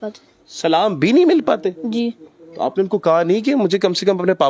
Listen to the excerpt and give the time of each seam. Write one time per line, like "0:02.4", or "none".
none